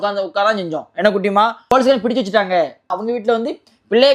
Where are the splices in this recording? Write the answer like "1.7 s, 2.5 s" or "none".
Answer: 1.7 s, 2.9 s